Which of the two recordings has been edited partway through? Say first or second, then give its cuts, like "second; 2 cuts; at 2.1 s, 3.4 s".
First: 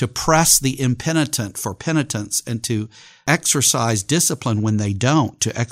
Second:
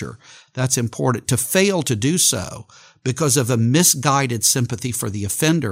first; 1 cut; at 3.0 s